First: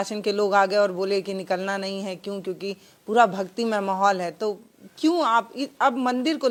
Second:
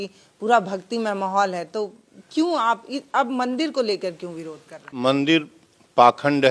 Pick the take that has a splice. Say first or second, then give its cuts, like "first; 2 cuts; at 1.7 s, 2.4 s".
second; 1 cut; at 4.9 s